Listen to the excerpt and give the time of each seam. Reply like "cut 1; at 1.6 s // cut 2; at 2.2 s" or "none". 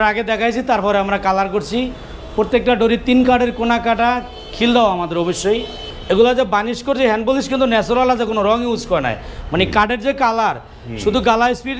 cut 1; at 5.9 s